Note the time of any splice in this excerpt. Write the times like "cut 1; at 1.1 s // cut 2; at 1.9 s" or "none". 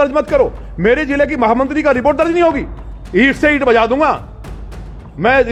none